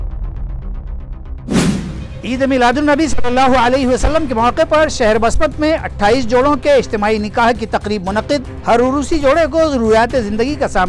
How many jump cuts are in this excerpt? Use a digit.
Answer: 1